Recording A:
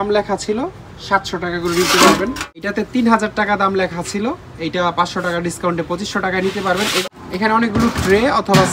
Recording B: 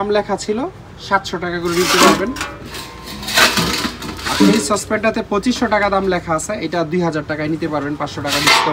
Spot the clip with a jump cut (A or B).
A